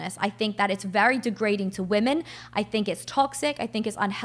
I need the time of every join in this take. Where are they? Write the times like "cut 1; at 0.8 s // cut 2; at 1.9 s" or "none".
cut 1; at 2.2 s